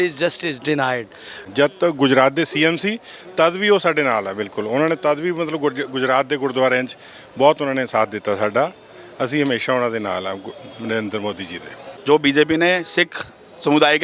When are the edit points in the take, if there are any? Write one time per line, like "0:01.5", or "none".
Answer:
0:01.4
0:11.9